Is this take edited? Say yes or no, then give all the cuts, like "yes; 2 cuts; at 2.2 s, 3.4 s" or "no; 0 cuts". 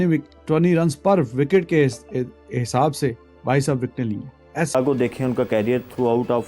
yes; 1 cut; at 4.7 s